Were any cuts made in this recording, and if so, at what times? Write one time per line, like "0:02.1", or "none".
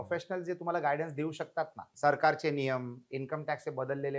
0:01.8